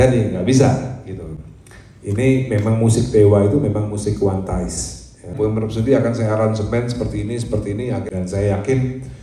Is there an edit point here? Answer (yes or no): yes